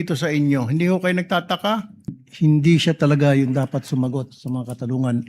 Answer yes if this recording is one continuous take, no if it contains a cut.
no